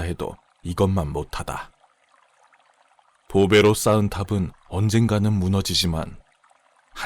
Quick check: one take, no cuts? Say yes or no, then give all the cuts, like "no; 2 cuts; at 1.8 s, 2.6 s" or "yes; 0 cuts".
no; 2 cuts; at 1.7 s, 3.3 s